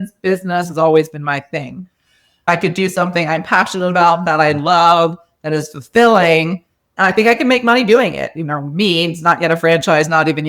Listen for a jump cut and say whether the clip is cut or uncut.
cut